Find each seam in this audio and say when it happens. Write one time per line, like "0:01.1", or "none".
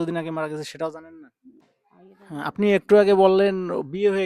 0:01.5